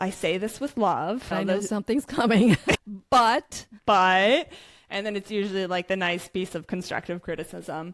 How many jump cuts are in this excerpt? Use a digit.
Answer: 1